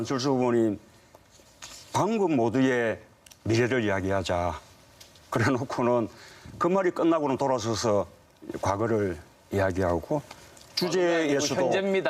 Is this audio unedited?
no; 1 cut; at 9.7 s

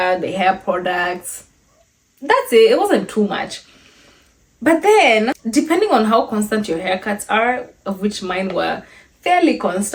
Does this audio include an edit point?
no; 0 cuts

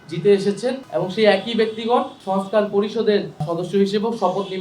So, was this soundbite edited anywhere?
yes; 3 cuts; at 0.8 s, 2.2 s, 3.5 s

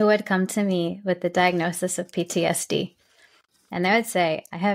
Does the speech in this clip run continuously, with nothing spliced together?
yes; 0 cuts

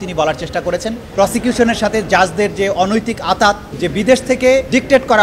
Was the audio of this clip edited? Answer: yes; 2 cuts; at 1.1 s, 3.7 s

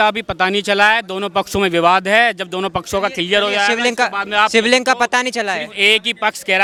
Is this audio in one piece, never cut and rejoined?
yes; 0 cuts

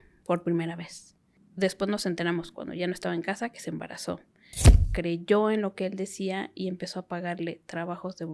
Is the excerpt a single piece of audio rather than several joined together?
no; 2 cuts; at 1.4 s, 4.7 s

